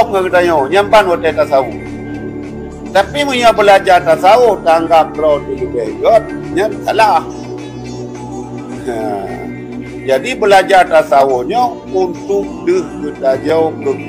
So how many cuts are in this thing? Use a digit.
0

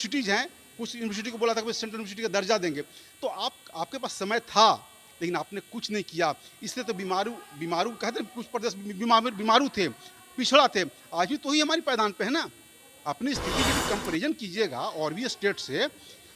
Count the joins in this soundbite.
0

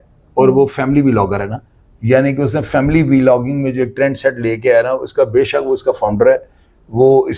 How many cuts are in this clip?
0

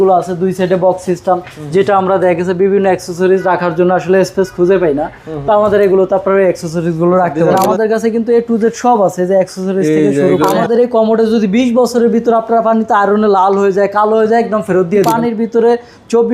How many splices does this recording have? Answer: 3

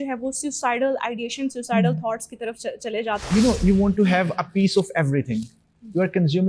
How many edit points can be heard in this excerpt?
1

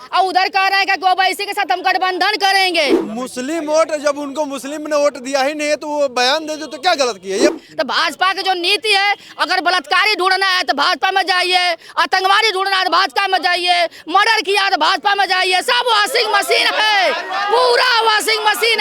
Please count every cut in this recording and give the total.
2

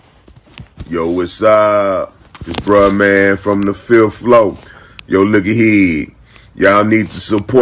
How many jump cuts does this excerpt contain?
0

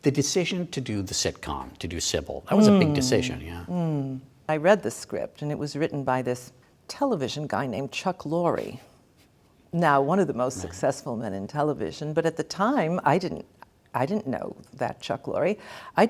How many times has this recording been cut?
1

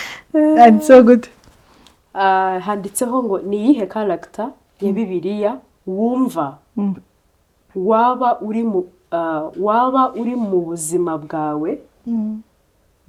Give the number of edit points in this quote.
0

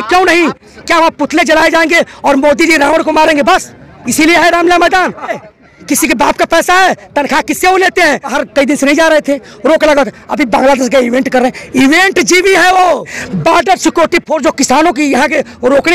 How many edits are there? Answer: 3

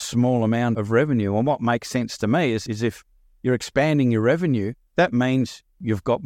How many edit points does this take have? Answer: 2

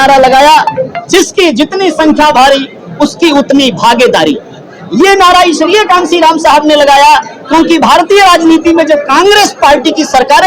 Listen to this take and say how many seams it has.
0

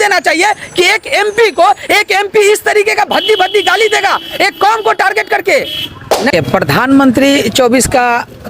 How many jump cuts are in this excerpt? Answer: 1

